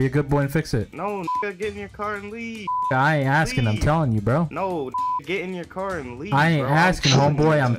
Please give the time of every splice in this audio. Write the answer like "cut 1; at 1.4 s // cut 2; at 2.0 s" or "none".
cut 1; at 0.9 s